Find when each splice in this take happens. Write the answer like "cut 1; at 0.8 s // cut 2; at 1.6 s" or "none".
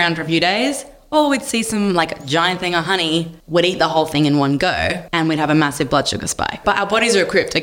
cut 1; at 3.4 s // cut 2; at 5.0 s // cut 3; at 6.6 s

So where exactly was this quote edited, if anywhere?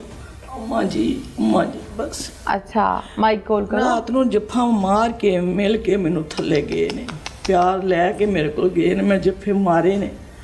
none

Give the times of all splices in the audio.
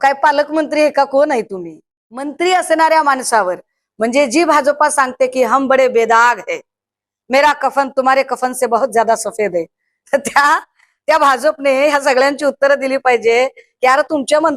cut 1; at 2.3 s

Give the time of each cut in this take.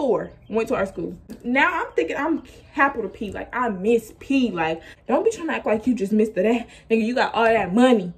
cut 1; at 1.3 s // cut 2; at 4.9 s

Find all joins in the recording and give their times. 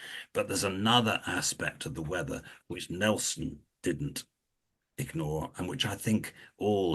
none

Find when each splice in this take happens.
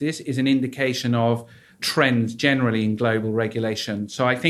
cut 1; at 1.8 s

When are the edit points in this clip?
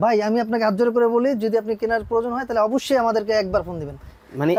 none

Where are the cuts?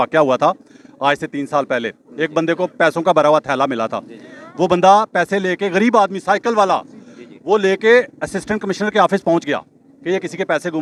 none

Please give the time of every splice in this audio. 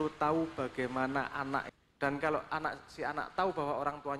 cut 1; at 1.7 s

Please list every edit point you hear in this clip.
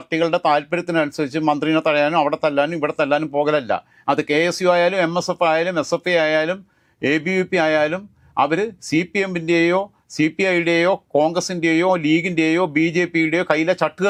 none

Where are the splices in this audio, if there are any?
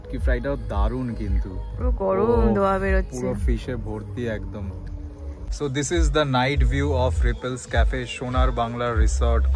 cut 1; at 5.5 s

